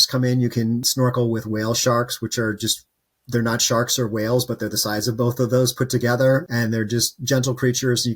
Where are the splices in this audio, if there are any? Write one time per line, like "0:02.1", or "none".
0:06.5